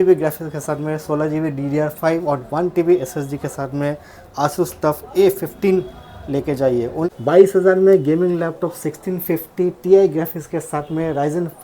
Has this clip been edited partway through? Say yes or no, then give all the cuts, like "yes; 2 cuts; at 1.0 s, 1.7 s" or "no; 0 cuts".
yes; 1 cut; at 7.1 s